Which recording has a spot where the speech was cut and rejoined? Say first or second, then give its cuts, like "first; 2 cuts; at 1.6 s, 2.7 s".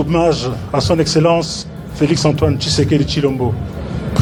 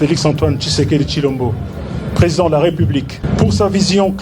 second; 1 cut; at 3.2 s